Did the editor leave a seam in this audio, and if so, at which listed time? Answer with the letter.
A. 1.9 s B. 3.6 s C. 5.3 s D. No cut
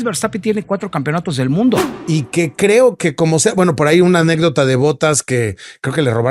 A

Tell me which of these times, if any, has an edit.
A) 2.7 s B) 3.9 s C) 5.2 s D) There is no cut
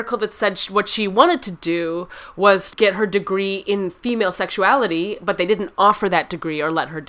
A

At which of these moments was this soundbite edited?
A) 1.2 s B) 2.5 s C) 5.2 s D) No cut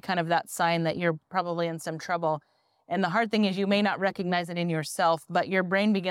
D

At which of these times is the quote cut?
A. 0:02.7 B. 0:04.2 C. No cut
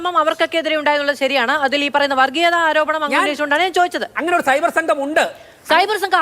B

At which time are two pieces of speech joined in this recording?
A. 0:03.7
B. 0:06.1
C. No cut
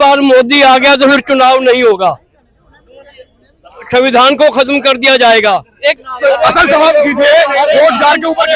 B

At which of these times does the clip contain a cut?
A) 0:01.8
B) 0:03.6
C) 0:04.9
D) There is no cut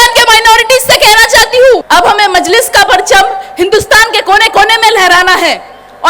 A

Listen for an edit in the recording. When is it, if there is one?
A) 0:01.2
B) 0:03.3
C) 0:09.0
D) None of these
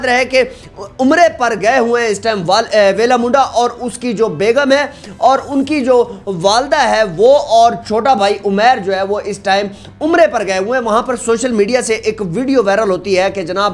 D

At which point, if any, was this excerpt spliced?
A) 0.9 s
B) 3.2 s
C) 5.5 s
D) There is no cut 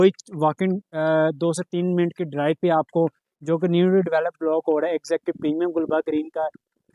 D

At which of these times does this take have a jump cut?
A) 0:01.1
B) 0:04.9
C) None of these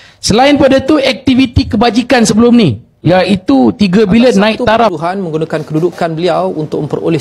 B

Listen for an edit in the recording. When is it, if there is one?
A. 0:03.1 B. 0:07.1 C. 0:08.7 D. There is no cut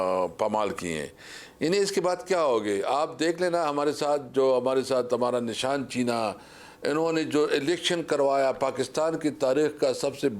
D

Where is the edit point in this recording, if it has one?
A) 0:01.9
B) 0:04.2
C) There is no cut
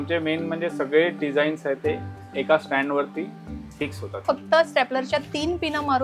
B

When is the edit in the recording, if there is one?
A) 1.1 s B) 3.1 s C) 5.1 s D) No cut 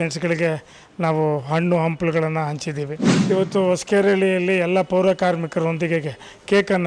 B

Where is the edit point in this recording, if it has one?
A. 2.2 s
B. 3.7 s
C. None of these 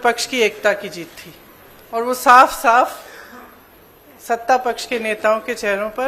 C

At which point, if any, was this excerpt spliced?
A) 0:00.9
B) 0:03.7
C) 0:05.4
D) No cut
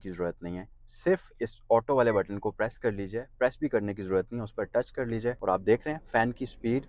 C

